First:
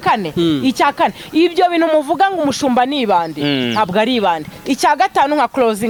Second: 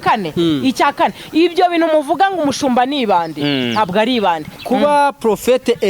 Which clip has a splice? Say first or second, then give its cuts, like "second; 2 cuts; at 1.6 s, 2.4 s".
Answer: second; 1 cut; at 4.5 s